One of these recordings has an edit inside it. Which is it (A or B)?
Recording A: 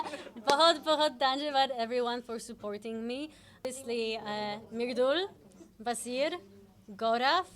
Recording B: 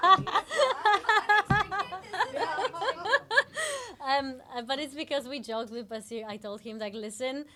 A